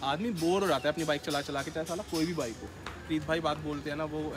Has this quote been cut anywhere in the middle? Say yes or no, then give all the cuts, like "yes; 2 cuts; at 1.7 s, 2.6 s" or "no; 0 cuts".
yes; 1 cut; at 2.6 s